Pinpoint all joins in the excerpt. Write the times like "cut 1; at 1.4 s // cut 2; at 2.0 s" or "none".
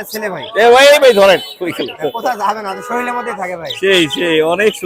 none